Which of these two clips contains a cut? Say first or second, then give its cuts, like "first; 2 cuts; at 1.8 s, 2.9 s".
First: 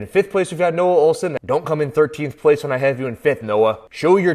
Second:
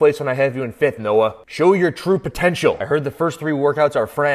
first; 1 cut; at 1.3 s